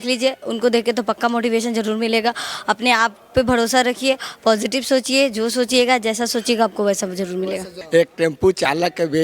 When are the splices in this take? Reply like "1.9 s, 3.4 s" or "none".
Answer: 7.7 s